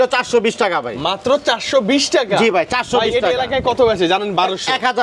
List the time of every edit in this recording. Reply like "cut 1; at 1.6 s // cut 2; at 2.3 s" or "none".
none